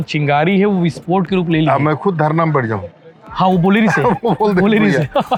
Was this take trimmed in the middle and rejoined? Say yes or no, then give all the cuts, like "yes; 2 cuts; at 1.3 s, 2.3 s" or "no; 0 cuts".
no; 0 cuts